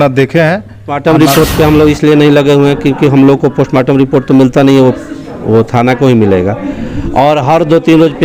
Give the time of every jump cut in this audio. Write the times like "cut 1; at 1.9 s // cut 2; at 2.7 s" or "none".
cut 1; at 0.9 s